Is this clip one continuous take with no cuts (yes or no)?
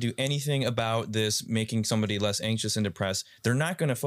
yes